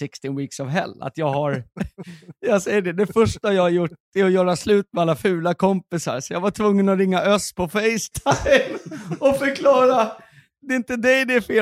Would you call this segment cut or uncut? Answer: uncut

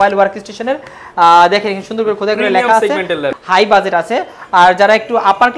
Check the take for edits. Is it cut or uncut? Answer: cut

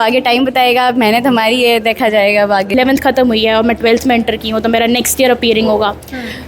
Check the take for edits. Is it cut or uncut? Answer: cut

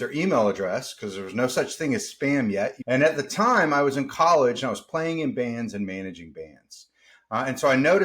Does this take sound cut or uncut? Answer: cut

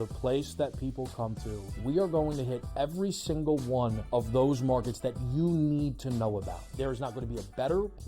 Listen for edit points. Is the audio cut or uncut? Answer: cut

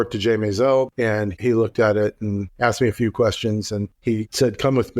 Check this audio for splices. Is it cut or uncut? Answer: cut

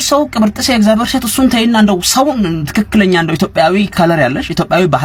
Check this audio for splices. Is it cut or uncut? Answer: uncut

